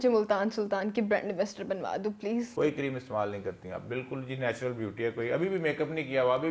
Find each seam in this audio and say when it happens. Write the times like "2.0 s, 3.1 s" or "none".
2.5 s